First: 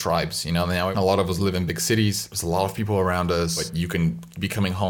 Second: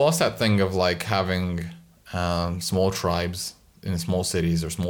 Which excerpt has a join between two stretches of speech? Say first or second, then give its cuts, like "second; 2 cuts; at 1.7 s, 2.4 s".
first; 3 cuts; at 0.9 s, 2.3 s, 3.6 s